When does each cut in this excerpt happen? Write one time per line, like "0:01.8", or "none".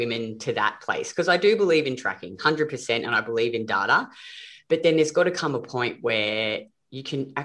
none